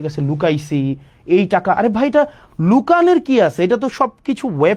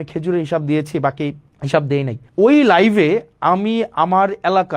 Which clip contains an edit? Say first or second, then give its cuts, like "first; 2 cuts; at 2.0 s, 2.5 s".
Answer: second; 2 cuts; at 1.5 s, 2.2 s